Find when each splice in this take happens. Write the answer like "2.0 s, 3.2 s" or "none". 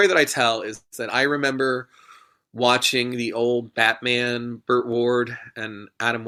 none

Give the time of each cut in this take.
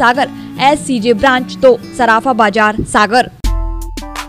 3.4 s

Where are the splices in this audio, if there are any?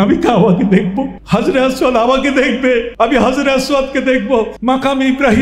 1.2 s, 2.9 s, 4.5 s

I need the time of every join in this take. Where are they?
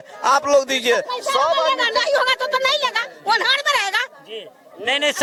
none

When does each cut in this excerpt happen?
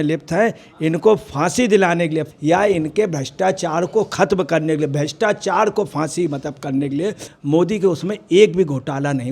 2.3 s, 7.3 s

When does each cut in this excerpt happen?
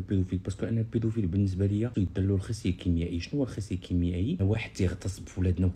1.9 s, 4.4 s

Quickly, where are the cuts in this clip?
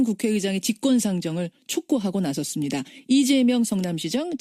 2.7 s

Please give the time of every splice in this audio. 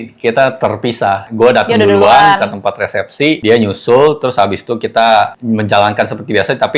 none

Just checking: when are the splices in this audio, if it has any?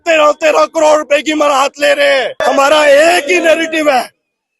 2.3 s

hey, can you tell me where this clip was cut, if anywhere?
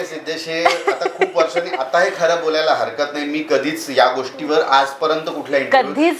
none

